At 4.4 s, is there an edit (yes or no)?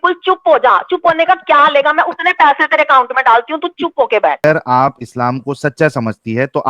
yes